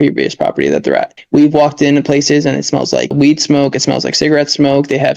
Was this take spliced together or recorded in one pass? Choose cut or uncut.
cut